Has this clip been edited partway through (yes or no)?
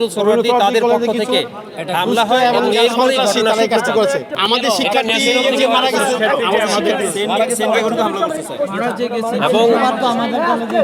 no